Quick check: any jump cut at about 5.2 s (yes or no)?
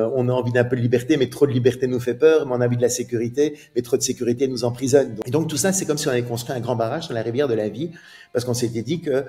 yes